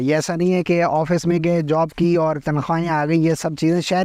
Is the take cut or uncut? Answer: uncut